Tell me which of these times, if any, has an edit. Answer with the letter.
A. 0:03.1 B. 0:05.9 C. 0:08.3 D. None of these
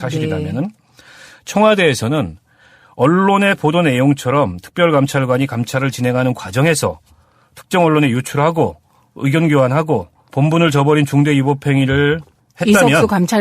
B